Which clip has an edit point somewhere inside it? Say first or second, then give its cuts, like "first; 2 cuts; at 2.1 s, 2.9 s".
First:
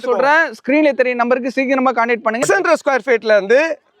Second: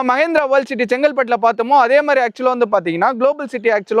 first; 1 cut; at 2.4 s